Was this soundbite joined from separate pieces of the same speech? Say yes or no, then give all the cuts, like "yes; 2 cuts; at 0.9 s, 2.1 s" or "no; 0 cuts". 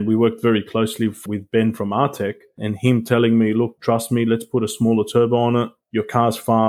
yes; 3 cuts; at 1.2 s, 2.7 s, 3.8 s